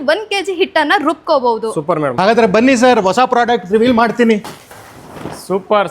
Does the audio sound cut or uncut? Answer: cut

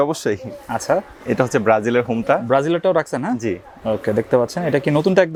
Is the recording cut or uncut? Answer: uncut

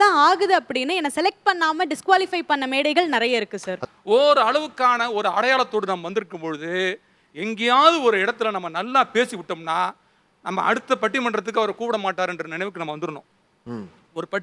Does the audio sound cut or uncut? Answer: cut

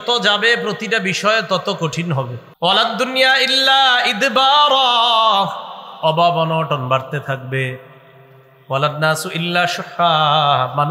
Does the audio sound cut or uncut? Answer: cut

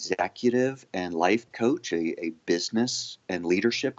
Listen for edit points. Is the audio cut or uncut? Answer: uncut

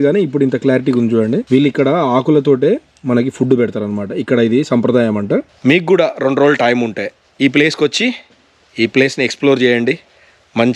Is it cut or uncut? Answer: cut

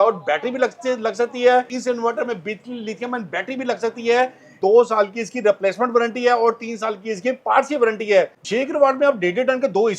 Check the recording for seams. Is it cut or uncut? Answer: cut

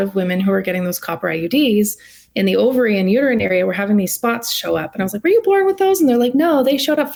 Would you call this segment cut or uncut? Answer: uncut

